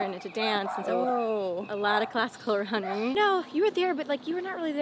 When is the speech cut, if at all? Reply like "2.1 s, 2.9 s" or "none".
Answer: 3.1 s